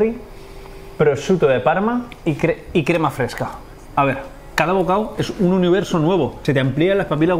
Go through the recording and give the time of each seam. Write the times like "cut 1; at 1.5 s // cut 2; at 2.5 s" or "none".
cut 1; at 4.4 s // cut 2; at 6.4 s